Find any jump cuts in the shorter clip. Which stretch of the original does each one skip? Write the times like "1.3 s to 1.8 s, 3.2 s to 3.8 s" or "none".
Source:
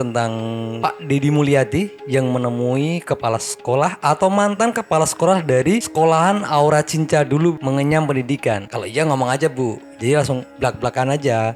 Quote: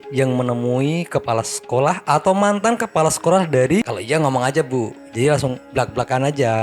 5.9 s to 8.8 s

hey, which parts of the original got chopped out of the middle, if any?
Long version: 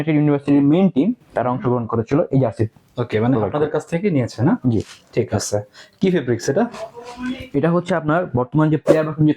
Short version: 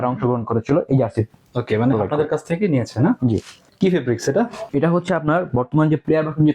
5.0 s to 5.8 s, 6.8 s to 7.4 s

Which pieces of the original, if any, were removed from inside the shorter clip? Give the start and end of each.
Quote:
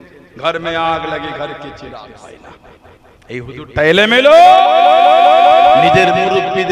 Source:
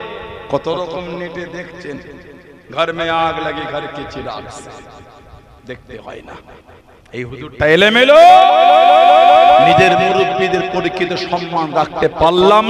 4.5 s to 6.0 s

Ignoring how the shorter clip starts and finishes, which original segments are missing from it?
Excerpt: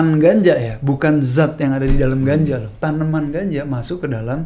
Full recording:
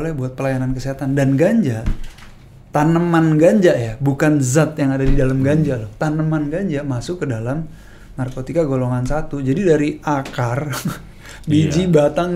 none

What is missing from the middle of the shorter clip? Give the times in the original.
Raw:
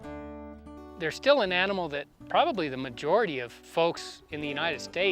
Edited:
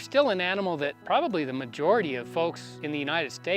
2.1 s to 2.2 s, 3.7 s to 4.0 s

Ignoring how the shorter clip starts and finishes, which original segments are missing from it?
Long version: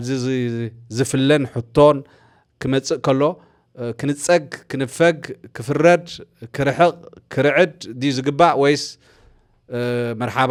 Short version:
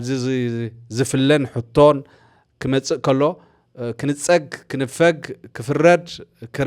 none

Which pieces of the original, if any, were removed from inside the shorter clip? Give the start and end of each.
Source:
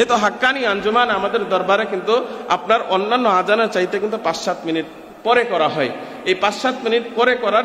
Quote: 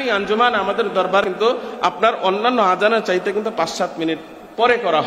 1.8 s to 1.9 s

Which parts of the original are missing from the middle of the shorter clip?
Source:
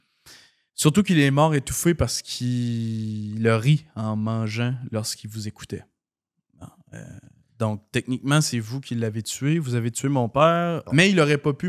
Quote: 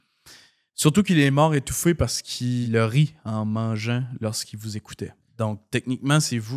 2.7 s to 3.4 s, 5.9 s to 7.4 s

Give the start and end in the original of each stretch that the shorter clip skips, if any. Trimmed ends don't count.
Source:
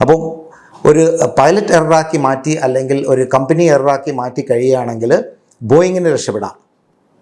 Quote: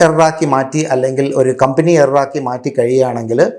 none

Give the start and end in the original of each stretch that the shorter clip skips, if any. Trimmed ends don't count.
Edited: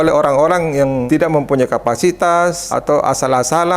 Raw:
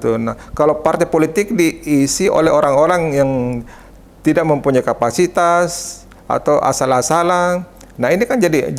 3.4 s to 4.2 s, 5.8 s to 6.3 s

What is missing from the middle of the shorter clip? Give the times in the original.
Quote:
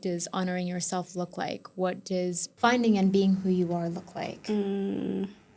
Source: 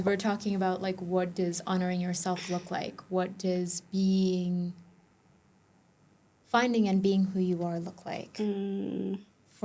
3.8 s to 6.4 s

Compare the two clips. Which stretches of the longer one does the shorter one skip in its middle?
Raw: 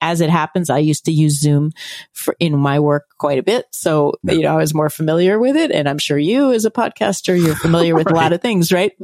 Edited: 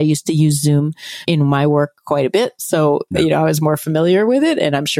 2.0 s to 2.4 s

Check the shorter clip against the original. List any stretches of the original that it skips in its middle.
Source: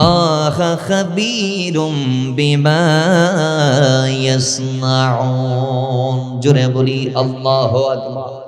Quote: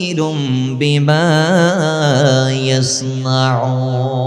none

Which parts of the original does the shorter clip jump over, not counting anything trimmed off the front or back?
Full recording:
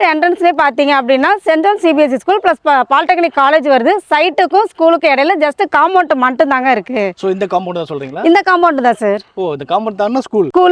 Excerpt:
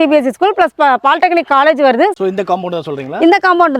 4.0 s to 7.2 s

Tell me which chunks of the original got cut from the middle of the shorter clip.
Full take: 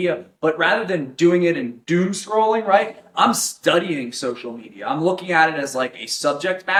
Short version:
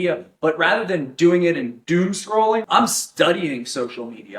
2.6 s to 3.1 s

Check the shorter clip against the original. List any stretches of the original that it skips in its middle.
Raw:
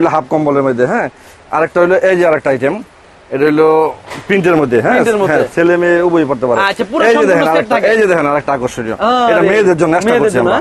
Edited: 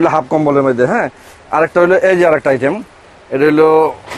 none

